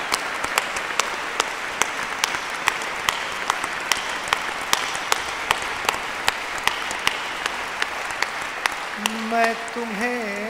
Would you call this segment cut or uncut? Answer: uncut